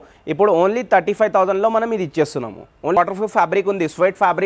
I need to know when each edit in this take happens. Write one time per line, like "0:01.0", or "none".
0:03.0